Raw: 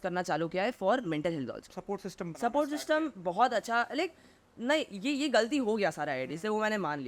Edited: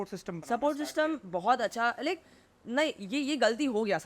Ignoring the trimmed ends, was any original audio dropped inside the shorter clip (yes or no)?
no